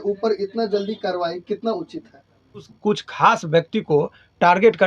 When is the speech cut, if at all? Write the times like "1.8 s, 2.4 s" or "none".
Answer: 2.7 s